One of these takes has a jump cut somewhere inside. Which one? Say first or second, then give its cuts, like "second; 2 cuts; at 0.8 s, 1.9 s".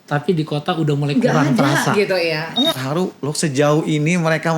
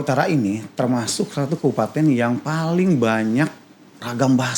first; 1 cut; at 2.8 s